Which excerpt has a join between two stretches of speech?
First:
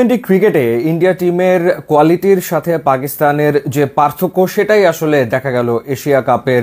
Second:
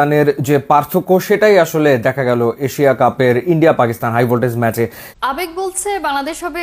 second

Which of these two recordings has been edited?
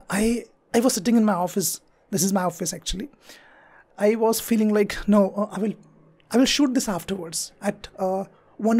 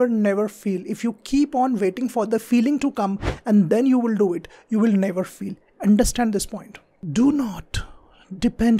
second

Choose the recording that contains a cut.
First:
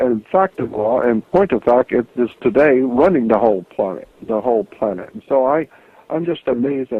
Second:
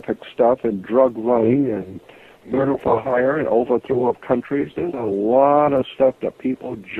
second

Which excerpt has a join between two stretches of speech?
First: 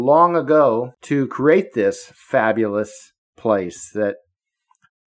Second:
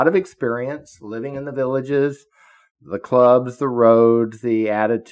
first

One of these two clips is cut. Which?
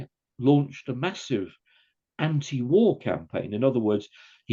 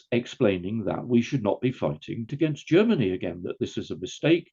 second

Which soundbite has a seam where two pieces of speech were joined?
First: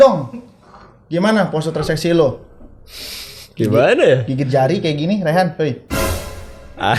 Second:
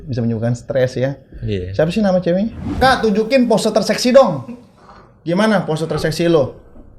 second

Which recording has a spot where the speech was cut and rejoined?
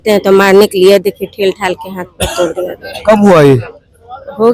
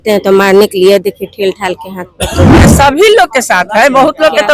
second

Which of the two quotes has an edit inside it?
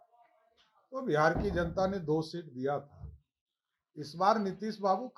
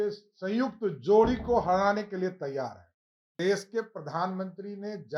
second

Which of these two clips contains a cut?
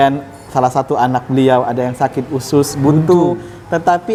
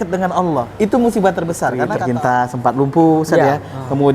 second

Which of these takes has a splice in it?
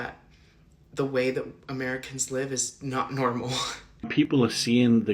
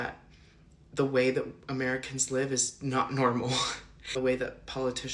first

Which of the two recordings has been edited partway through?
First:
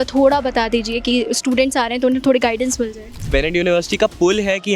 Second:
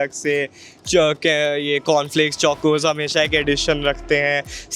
first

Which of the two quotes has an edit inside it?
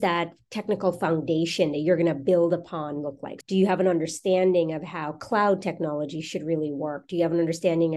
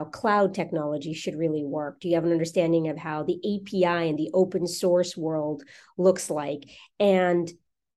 first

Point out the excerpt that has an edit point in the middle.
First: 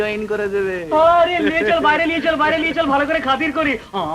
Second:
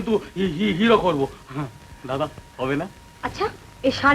second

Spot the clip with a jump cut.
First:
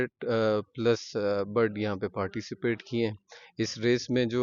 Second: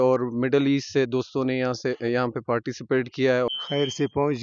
second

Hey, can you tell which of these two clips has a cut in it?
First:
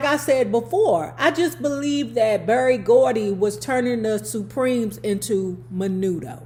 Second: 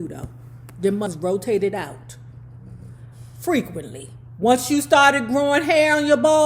second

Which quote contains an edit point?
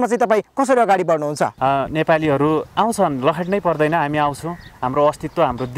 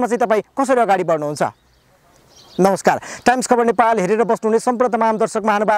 first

